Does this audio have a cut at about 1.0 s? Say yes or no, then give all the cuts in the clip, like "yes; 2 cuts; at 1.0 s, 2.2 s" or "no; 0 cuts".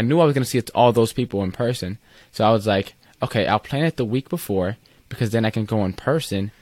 no; 0 cuts